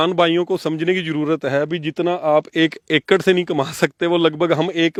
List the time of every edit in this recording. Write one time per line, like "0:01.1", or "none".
none